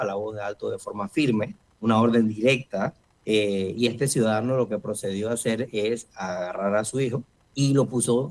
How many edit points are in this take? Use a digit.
3